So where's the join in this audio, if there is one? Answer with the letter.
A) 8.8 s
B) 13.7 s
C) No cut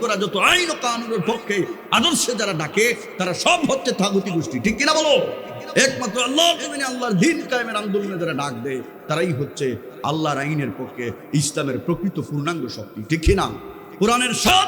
B